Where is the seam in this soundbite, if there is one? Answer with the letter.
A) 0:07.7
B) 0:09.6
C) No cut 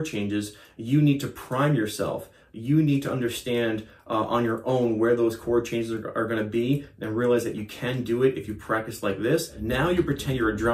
B